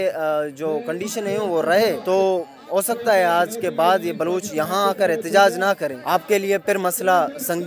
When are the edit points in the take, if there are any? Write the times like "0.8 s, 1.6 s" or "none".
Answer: 2.0 s, 6.0 s